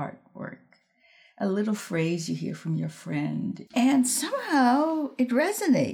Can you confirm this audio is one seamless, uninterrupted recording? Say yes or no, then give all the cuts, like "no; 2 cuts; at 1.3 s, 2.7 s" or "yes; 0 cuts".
no; 1 cut; at 3.6 s